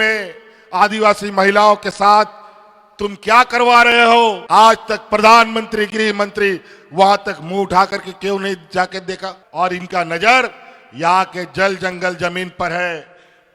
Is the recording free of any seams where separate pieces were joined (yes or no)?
no